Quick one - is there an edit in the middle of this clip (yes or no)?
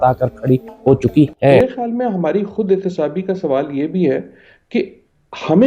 yes